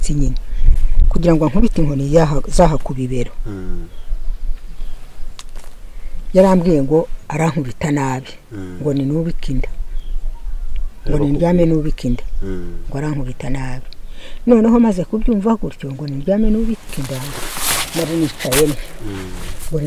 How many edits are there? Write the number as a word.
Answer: zero